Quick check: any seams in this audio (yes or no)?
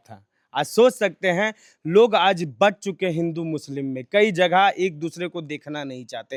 no